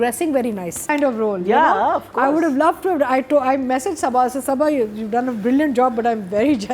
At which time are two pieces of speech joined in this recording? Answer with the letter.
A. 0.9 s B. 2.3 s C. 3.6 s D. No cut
A